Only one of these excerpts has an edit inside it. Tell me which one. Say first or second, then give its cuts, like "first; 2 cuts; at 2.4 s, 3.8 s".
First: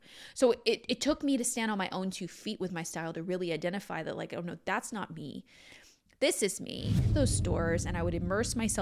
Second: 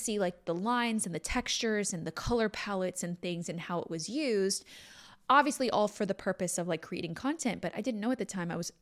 first; 1 cut; at 7.1 s